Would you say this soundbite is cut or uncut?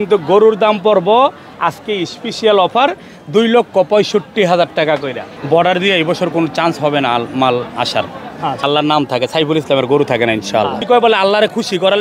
cut